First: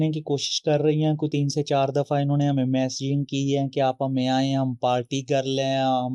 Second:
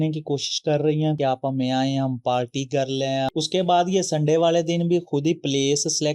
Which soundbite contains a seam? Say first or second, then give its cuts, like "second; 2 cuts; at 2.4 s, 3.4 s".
second; 2 cuts; at 1.2 s, 3.3 s